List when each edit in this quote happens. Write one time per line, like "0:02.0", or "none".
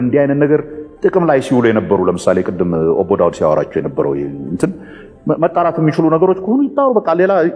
none